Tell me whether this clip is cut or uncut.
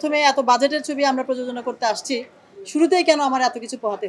uncut